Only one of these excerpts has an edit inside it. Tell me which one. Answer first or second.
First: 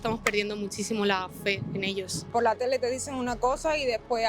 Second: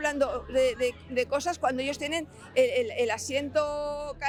first